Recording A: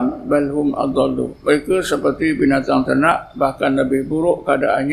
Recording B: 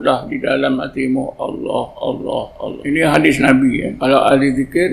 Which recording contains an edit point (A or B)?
B